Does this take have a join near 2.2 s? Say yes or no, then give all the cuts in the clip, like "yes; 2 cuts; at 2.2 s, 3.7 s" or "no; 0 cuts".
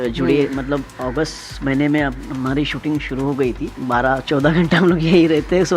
no; 1 cut; at 3.7 s